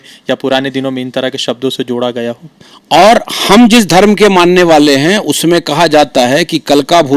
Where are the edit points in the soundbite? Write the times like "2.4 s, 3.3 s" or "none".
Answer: 2.5 s